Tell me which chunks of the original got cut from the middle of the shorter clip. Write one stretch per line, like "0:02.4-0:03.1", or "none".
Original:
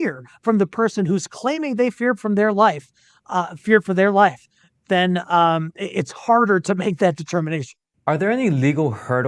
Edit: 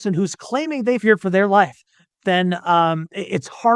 0:01.9-0:03.6